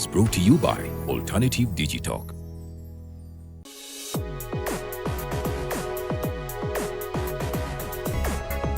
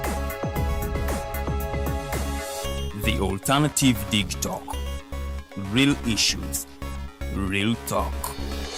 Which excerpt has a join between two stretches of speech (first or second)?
first